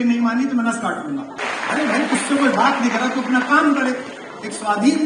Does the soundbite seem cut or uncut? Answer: cut